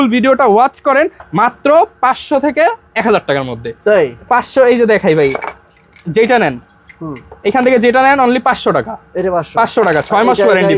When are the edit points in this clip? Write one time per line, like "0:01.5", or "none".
0:01.2